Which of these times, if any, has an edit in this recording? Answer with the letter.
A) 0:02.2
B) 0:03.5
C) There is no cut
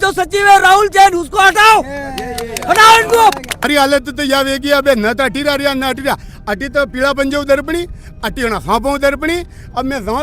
B